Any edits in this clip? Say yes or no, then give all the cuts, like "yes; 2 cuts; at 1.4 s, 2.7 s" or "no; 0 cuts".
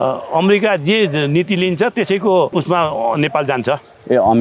yes; 1 cut; at 2.5 s